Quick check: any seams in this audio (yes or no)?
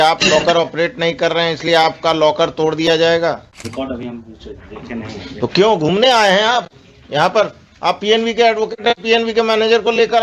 yes